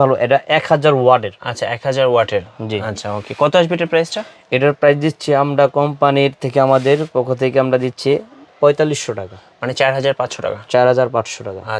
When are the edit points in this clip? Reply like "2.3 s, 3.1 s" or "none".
none